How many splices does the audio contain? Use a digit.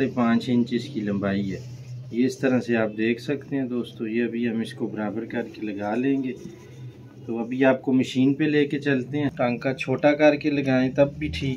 1